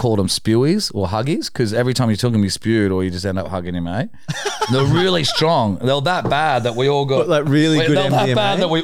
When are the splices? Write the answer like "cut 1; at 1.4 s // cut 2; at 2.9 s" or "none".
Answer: none